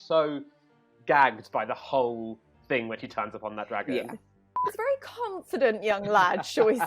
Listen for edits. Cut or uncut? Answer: cut